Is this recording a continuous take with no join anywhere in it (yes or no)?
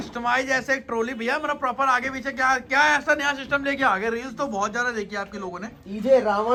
yes